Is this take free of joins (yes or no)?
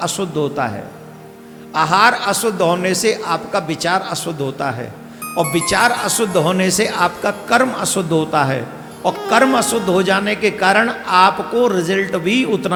yes